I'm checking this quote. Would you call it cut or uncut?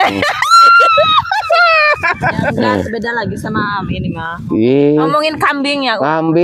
uncut